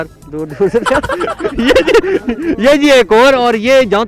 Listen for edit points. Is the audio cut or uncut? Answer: uncut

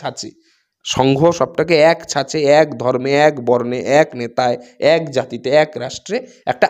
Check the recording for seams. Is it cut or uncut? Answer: uncut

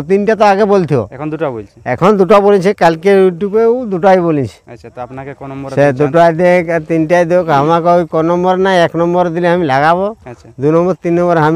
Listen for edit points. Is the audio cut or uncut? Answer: uncut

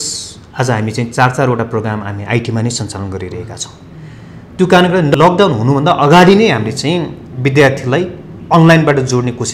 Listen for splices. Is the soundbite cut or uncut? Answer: cut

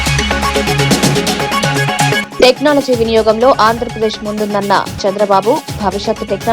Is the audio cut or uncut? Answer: cut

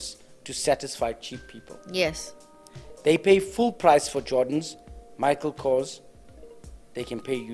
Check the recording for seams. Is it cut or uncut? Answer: uncut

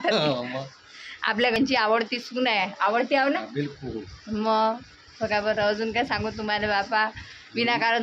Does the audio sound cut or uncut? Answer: cut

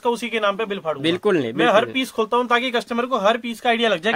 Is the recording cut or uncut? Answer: uncut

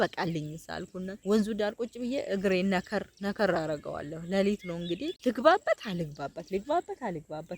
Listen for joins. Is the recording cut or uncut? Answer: cut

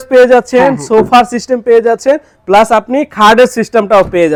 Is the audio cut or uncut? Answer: uncut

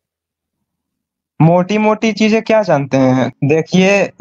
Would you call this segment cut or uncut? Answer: cut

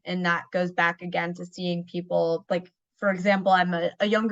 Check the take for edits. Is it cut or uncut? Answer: cut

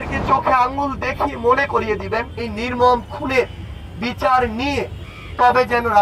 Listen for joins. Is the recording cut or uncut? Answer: uncut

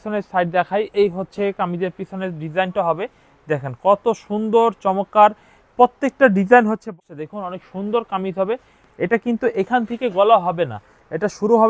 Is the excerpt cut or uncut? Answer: cut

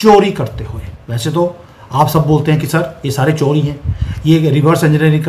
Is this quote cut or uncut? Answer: uncut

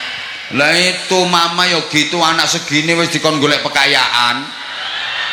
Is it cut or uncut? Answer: uncut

